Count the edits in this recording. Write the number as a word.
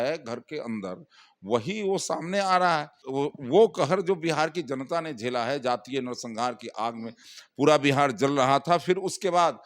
one